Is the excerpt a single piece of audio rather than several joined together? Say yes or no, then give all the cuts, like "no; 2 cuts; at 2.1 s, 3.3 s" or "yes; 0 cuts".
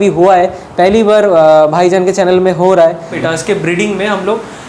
no; 1 cut; at 3.1 s